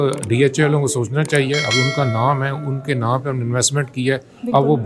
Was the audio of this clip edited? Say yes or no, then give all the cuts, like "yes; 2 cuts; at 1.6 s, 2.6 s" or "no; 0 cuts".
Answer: no; 0 cuts